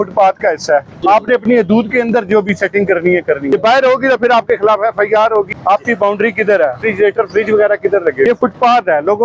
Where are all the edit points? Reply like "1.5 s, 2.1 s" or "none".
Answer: 0.9 s, 3.5 s, 5.5 s, 6.8 s, 8.3 s